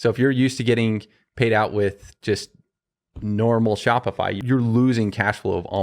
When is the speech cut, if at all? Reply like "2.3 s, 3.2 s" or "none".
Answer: 4.4 s